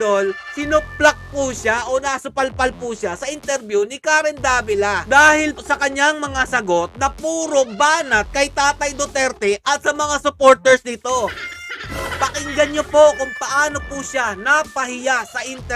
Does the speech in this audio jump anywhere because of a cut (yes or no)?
no